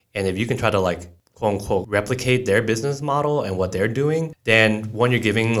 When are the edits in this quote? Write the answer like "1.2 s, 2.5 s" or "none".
1.7 s, 4.3 s

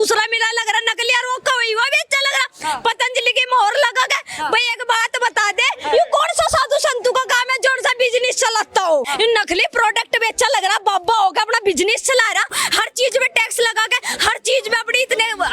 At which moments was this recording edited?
9.1 s, 12.6 s

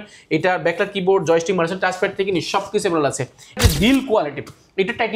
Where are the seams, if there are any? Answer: 3.5 s

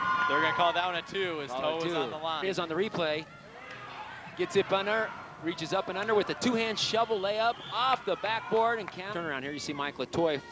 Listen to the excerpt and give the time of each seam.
2.4 s, 9.1 s

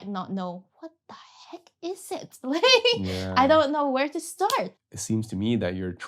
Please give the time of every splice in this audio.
4.7 s

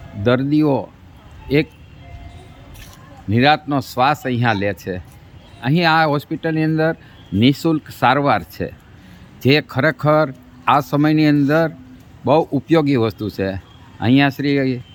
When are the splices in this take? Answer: none

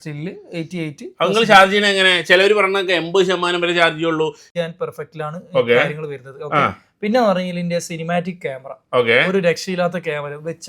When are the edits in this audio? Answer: 4.4 s

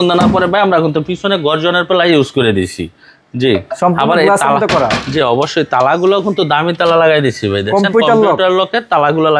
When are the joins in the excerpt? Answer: none

